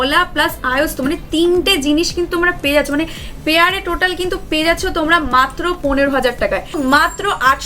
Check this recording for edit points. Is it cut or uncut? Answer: cut